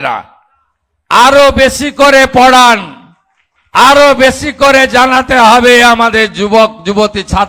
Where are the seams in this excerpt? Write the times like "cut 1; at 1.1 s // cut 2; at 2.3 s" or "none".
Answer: none